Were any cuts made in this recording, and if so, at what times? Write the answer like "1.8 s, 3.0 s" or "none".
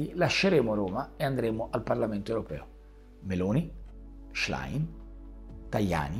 none